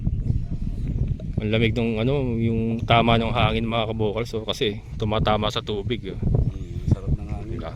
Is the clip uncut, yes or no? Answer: yes